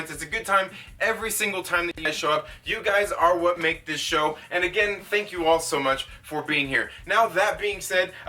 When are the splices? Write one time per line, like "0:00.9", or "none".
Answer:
0:02.1